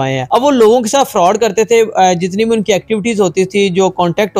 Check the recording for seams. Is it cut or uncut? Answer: uncut